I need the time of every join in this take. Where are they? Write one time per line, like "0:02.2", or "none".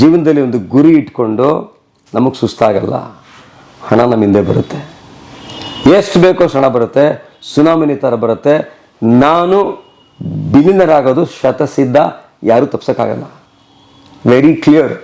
none